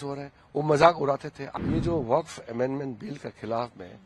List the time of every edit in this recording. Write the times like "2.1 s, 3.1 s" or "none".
1.4 s